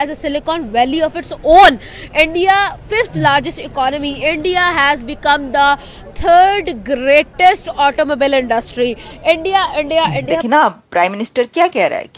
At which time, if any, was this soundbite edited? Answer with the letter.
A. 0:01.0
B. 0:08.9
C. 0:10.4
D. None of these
C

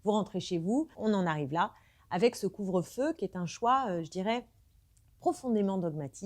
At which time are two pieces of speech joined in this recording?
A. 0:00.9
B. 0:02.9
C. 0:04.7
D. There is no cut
A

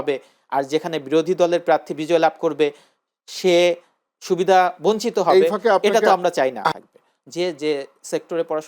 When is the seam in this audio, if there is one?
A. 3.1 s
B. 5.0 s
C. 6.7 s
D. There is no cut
C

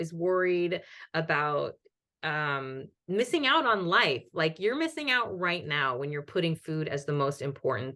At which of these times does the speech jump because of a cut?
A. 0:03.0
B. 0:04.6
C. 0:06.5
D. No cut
D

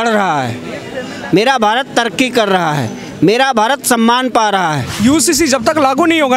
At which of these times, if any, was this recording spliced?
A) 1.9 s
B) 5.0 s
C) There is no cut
B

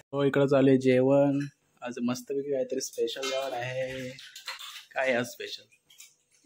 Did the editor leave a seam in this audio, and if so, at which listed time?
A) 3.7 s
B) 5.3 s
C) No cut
C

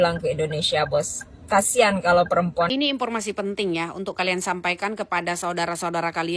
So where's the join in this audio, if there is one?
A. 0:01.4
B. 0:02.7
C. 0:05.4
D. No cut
B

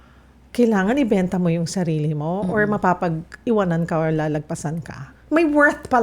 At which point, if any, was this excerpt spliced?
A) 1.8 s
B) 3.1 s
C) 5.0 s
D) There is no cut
C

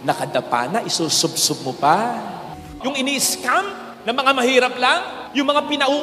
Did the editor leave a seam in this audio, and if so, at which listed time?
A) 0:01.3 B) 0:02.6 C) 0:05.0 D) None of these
B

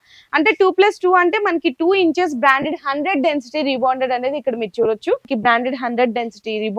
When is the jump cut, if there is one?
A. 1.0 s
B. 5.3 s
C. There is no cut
B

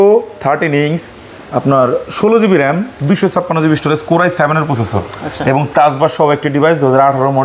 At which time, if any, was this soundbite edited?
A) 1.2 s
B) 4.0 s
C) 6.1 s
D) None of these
D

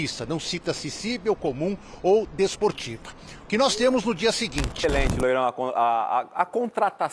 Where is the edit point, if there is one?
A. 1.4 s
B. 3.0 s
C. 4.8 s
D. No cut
C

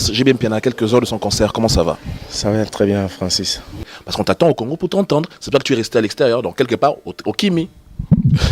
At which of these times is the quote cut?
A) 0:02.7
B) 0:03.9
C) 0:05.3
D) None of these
B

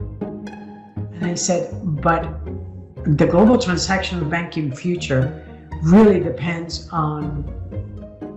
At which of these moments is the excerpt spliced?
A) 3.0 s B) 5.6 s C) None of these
C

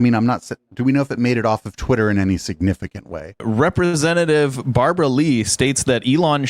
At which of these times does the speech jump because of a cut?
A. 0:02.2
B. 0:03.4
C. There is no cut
B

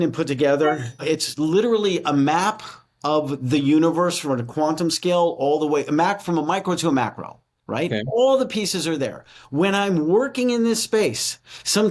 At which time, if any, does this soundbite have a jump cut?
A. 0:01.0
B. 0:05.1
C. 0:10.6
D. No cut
A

